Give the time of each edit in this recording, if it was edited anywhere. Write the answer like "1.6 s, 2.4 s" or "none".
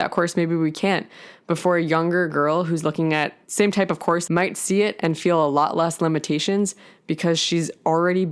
4.2 s

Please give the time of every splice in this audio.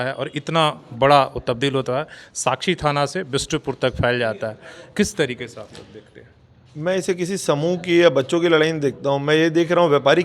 none

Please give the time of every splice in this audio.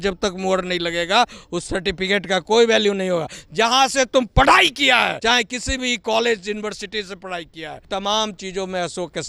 5.2 s, 7.8 s

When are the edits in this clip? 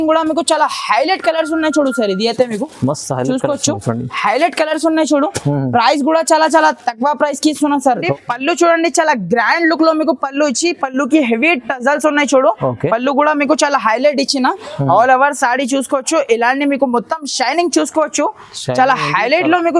8.1 s

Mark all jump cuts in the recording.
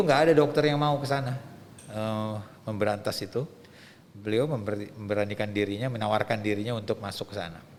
none

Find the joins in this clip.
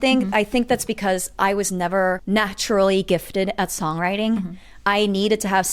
2.2 s

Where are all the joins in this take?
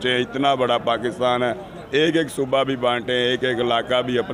none

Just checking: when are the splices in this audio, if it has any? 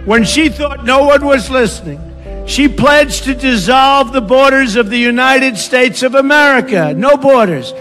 1.8 s

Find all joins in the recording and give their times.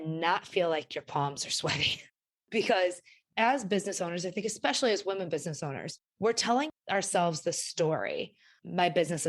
6.7 s

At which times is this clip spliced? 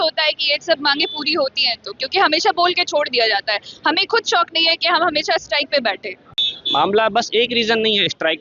none

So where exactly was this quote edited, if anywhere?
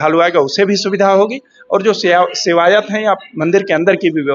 none

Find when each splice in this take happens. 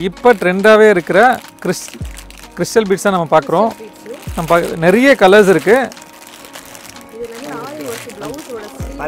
none

